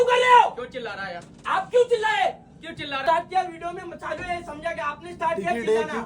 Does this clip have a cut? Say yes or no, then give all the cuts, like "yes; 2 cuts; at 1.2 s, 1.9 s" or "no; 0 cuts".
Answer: yes; 1 cut; at 3.0 s